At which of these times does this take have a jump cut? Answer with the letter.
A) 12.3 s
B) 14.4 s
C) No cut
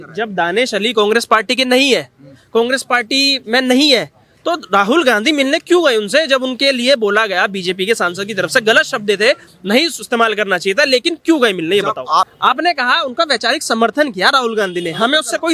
A